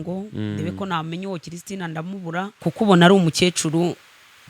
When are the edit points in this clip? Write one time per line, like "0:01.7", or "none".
0:02.5